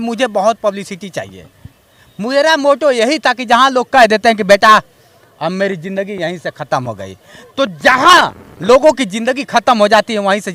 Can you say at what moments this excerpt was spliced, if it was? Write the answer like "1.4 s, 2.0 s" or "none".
none